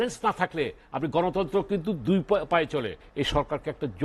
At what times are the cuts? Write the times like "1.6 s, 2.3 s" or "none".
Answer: 3.0 s